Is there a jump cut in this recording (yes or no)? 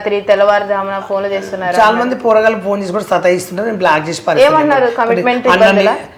no